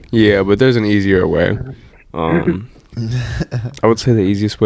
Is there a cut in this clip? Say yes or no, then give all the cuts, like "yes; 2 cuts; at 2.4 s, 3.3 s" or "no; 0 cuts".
no; 0 cuts